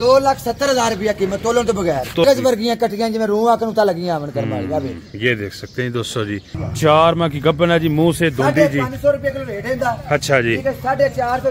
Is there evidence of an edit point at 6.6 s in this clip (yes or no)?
yes